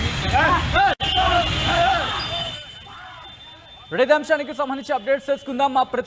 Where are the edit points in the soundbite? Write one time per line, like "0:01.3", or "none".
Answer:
0:00.9